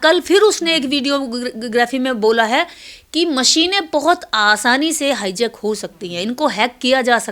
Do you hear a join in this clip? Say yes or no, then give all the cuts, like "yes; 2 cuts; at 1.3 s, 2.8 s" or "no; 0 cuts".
no; 0 cuts